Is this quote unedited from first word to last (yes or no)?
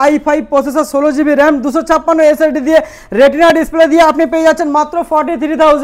yes